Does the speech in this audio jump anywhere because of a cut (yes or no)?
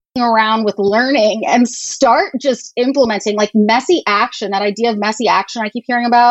no